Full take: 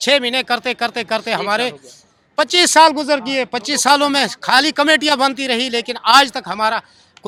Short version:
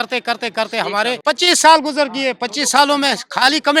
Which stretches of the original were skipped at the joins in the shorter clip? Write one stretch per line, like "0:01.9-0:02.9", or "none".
0:01.7-0:02.3